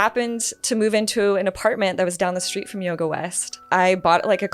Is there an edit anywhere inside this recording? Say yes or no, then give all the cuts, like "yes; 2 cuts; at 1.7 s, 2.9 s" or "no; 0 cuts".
yes; 1 cut; at 3.6 s